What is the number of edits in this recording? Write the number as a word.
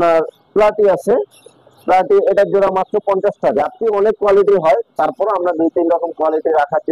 one